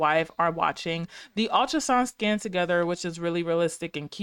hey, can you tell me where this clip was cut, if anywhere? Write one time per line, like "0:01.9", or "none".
none